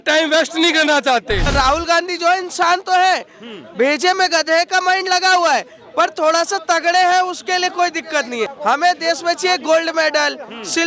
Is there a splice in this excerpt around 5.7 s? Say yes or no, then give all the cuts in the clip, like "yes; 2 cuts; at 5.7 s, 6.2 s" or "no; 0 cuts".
no; 2 cuts; at 1.5 s, 8.5 s